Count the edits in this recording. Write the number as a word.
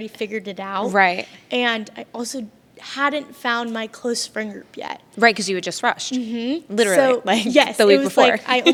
zero